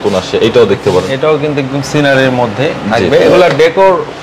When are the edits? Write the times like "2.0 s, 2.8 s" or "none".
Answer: none